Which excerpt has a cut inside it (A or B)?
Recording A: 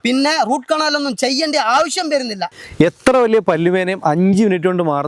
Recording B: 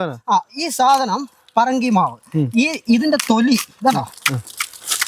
A